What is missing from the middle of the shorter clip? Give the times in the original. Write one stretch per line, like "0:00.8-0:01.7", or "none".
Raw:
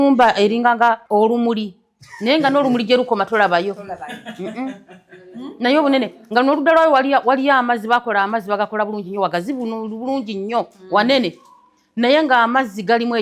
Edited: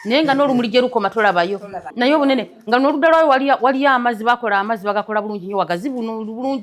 0:03.9-0:05.4